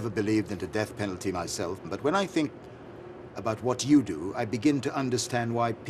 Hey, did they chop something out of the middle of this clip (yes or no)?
yes